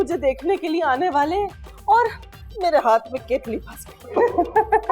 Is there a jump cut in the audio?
no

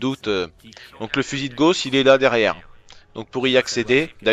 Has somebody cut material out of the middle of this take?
yes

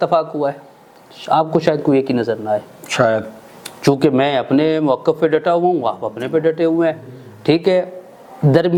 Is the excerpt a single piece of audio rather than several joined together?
yes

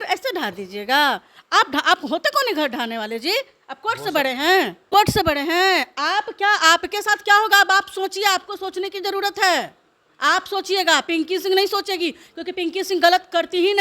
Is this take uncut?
no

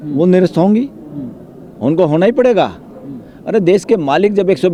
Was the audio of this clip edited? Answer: no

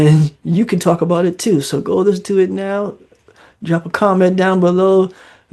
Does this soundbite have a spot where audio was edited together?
no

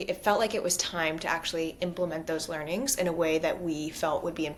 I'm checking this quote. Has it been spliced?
no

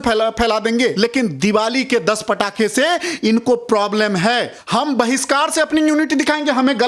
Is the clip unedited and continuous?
no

